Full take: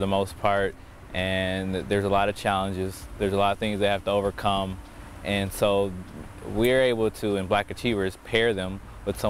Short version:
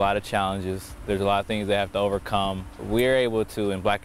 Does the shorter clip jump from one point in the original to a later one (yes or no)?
yes